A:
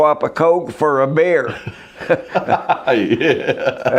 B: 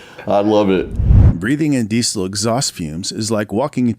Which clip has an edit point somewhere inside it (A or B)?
B